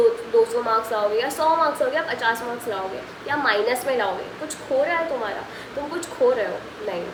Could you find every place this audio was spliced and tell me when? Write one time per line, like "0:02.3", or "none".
none